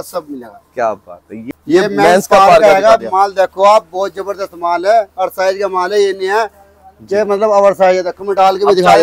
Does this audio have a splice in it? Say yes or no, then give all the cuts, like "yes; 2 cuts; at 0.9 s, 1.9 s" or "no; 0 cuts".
yes; 1 cut; at 1.5 s